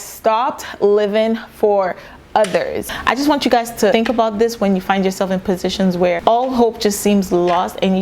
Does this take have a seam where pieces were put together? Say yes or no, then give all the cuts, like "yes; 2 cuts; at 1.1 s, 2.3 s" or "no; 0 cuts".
yes; 3 cuts; at 2.8 s, 3.9 s, 6.2 s